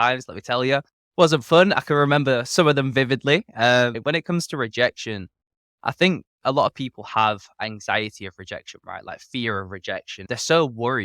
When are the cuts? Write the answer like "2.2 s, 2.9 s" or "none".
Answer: 4.0 s, 10.3 s